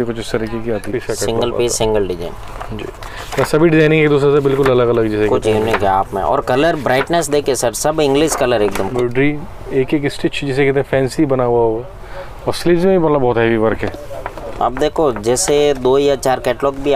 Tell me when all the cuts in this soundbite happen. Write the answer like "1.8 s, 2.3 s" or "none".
1.0 s, 8.9 s, 13.9 s